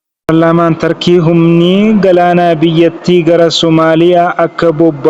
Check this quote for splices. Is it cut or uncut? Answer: uncut